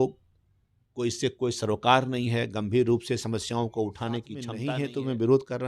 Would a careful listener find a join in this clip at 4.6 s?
yes; 1 cut; at 4.6 s

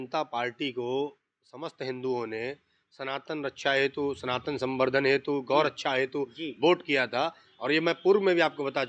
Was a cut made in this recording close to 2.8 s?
no; 0 cuts

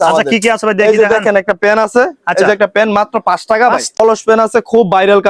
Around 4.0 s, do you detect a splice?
yes; 1 cut; at 4.0 s

